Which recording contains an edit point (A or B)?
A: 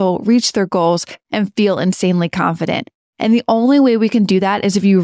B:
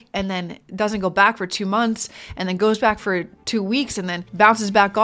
B